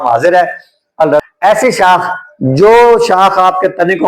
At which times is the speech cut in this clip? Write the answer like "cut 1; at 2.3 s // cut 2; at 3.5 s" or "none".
cut 1; at 1.2 s